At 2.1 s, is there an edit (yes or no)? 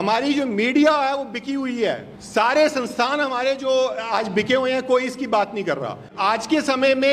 yes